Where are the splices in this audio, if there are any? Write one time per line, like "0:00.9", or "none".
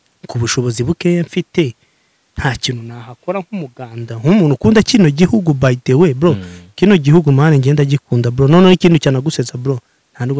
none